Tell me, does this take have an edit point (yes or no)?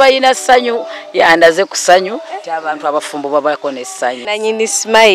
yes